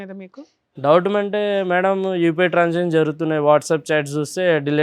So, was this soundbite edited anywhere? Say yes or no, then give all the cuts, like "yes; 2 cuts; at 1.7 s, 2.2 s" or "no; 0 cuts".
no; 0 cuts